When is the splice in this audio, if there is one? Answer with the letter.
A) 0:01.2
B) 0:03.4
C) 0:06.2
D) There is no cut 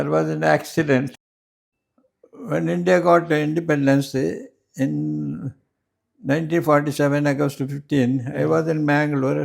A